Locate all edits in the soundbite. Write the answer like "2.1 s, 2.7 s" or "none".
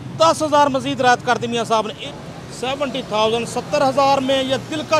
2.0 s

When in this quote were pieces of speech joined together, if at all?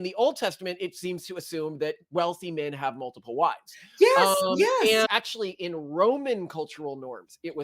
5.1 s

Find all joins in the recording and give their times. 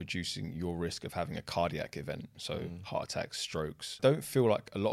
4.0 s

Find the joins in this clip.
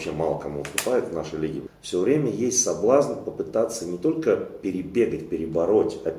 1.7 s

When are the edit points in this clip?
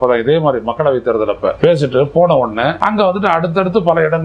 1.5 s, 2.8 s

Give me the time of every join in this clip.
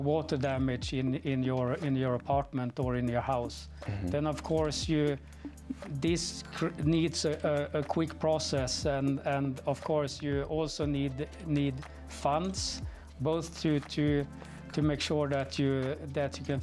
none

